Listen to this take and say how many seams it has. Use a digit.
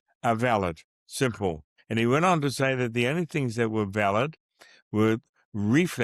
1